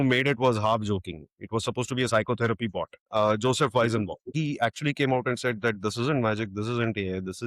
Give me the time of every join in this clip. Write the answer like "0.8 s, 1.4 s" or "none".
3.0 s, 4.3 s